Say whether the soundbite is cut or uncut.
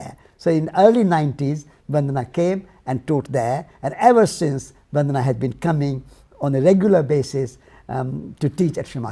cut